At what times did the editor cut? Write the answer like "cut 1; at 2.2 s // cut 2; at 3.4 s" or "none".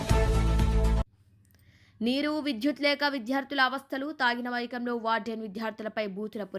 cut 1; at 1.0 s